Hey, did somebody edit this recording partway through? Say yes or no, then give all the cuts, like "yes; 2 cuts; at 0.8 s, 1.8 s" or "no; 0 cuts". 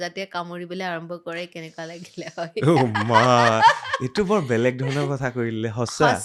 no; 0 cuts